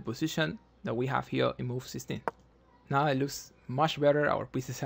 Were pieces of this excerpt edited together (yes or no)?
yes